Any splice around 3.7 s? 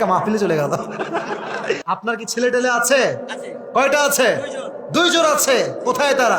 no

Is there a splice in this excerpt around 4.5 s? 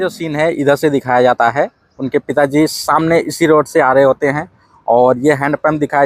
no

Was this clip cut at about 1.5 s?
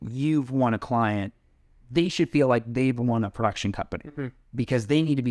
no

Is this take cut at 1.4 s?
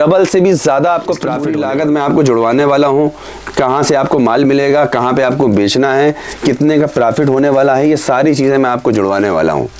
yes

